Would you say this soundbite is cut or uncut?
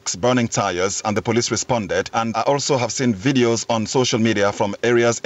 cut